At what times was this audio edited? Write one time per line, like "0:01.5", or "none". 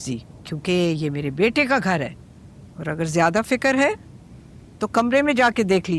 none

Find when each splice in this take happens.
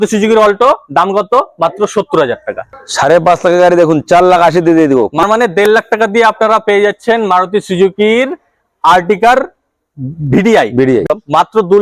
0:02.7
0:05.2
0:11.1

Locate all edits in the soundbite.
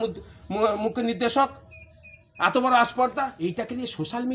0:03.4

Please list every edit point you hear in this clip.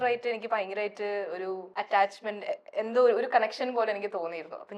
0:01.7

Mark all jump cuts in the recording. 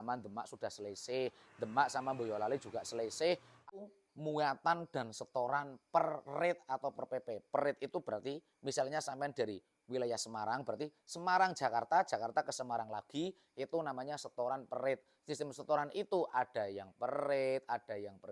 0:03.7

